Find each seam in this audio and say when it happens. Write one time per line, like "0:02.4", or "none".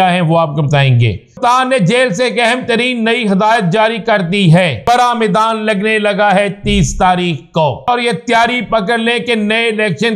0:01.4
0:04.8
0:07.9

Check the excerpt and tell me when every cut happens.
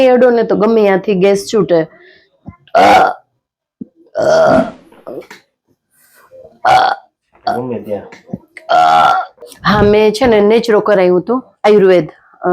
none

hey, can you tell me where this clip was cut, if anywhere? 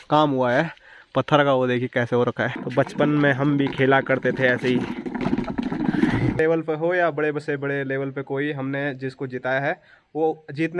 0:02.6
0:06.4

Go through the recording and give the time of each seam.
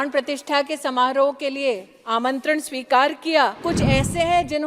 0:03.6

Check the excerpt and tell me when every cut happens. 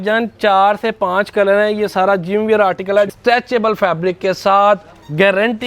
0:03.1

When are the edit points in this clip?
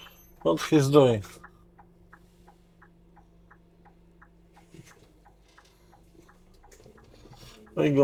none

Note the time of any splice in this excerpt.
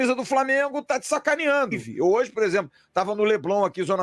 0:01.8

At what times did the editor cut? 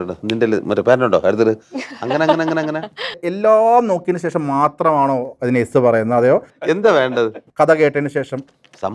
0:03.3
0:06.5
0:07.4

